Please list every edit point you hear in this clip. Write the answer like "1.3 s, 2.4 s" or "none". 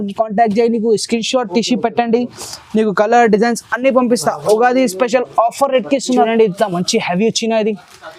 6.3 s